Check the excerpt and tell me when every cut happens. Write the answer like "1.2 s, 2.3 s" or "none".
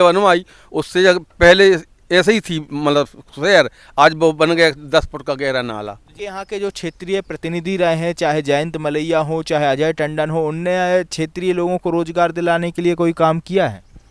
6.1 s